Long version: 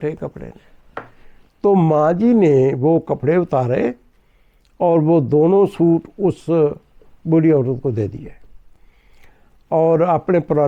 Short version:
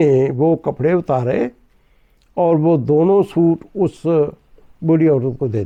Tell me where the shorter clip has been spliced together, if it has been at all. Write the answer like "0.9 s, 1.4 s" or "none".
none